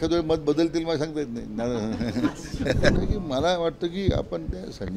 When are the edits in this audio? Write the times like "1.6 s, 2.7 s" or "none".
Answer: 2.9 s